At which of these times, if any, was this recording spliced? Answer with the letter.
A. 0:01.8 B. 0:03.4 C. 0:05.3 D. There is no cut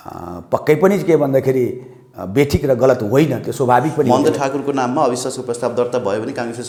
D